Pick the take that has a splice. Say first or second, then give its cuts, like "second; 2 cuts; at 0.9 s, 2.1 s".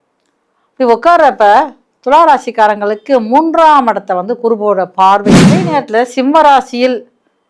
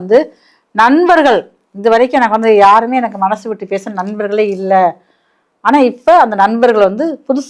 first; 1 cut; at 5.7 s